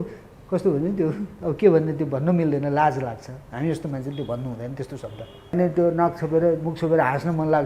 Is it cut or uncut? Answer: cut